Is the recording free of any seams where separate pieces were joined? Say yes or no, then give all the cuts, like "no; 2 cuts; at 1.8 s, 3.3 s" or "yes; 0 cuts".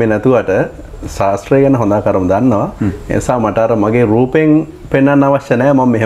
yes; 0 cuts